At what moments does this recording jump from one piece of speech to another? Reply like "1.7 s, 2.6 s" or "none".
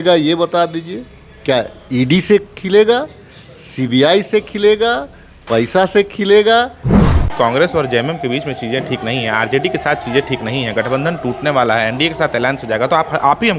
7.1 s